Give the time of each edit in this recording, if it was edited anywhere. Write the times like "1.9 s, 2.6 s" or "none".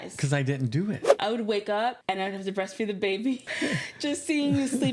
1.1 s, 2.0 s, 3.5 s